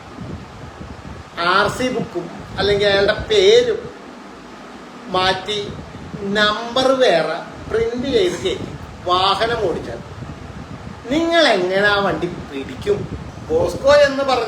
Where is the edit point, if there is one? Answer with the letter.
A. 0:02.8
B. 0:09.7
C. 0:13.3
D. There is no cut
C